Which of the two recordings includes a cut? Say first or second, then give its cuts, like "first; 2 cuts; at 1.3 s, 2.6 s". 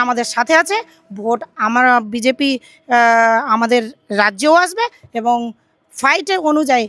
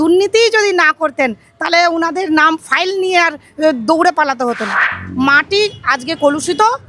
second; 1 cut; at 5.0 s